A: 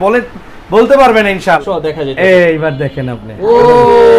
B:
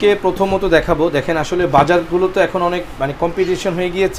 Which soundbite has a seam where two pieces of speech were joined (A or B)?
A